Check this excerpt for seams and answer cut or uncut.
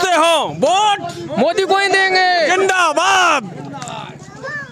uncut